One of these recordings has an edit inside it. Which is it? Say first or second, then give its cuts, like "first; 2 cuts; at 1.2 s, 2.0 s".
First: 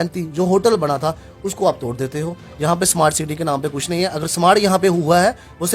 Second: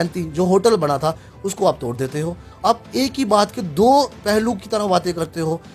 first; 1 cut; at 2.4 s